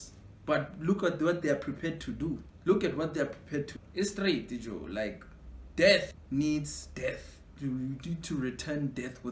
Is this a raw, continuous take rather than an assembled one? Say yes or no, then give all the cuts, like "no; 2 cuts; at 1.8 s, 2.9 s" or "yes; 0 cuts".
no; 3 cuts; at 2.5 s, 3.7 s, 6.2 s